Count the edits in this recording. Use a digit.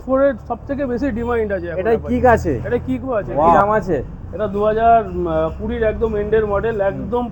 1